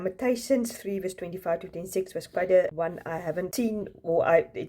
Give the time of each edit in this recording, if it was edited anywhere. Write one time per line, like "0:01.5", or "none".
0:03.3